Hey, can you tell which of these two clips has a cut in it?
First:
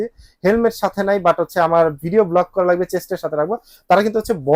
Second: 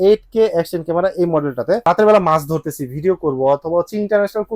second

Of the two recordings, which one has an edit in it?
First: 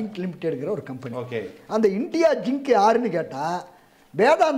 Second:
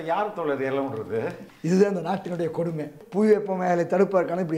second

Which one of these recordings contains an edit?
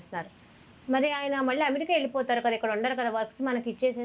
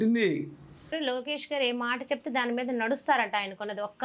second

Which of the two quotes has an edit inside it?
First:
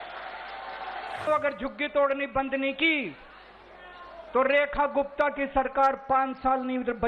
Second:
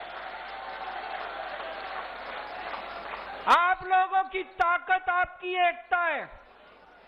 first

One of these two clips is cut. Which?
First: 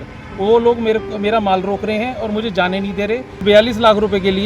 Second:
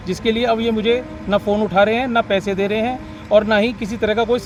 first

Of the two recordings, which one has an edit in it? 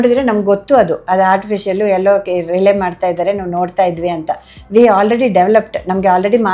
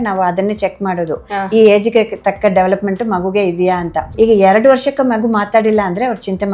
second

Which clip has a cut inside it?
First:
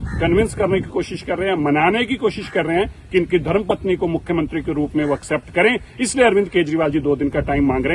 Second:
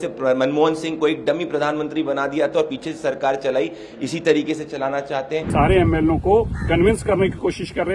second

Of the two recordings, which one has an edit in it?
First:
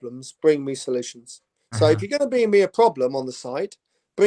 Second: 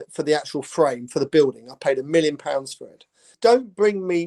second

